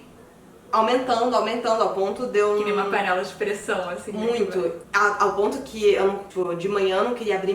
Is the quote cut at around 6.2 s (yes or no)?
yes